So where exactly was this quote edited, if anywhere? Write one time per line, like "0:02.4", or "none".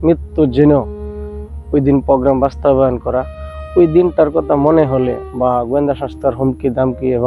none